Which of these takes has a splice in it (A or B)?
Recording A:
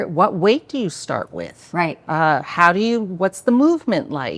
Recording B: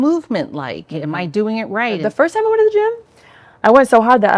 B